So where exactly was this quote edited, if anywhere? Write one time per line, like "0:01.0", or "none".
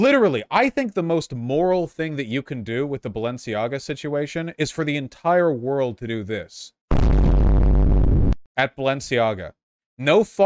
0:08.4